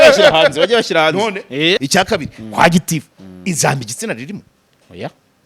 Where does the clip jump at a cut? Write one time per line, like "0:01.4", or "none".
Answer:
0:01.8